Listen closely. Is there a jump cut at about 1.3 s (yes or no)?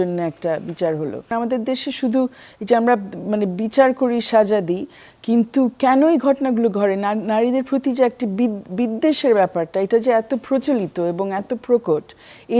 yes